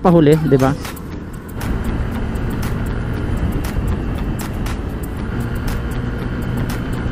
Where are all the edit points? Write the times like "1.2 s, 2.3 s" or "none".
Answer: 1.6 s, 5.3 s